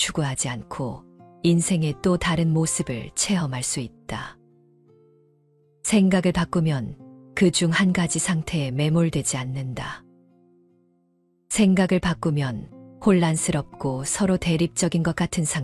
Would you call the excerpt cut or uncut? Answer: cut